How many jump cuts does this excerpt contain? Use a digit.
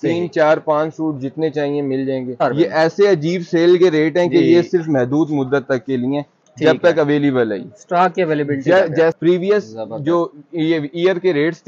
2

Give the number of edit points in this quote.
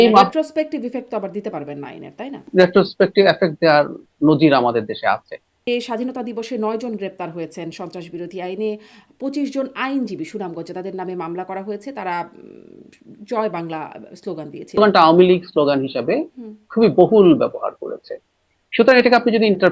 3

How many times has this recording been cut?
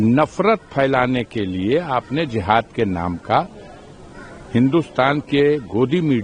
0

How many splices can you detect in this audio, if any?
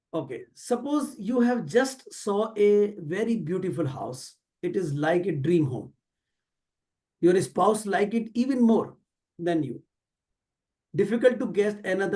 0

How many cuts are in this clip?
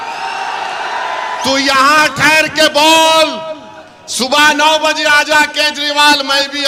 0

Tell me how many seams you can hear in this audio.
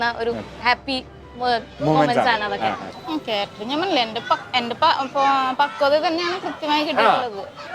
1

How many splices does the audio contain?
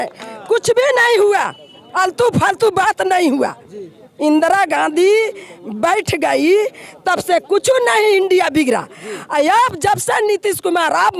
0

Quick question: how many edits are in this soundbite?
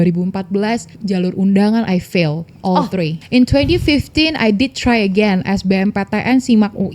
2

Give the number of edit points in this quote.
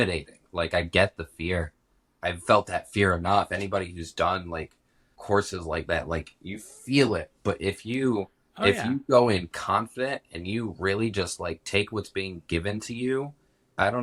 0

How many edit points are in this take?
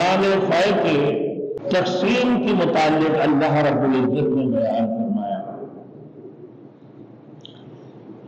1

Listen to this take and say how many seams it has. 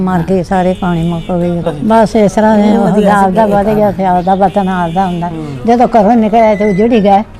1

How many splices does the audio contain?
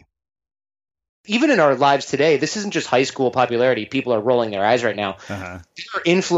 1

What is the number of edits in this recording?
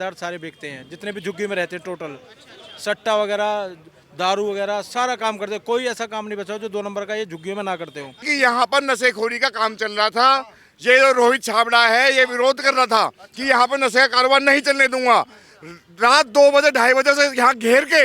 1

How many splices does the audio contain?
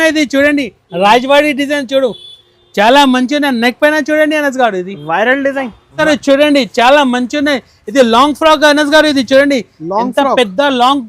1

